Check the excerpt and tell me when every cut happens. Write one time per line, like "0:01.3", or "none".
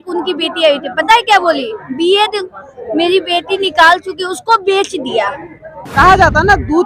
0:05.8